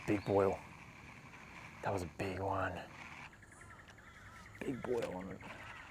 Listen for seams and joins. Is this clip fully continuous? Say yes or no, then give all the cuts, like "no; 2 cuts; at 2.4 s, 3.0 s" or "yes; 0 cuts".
no; 1 cut; at 3.2 s